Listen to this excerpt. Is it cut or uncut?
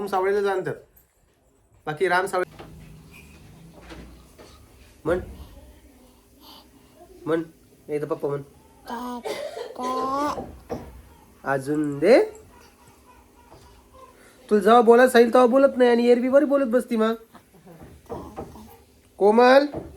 cut